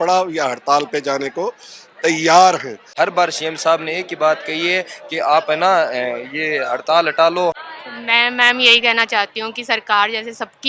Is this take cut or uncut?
cut